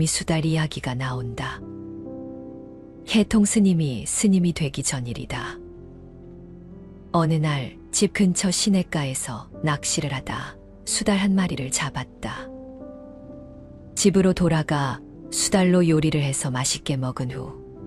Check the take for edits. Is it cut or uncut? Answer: uncut